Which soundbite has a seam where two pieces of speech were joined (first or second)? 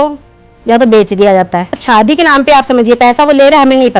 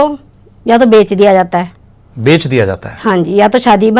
first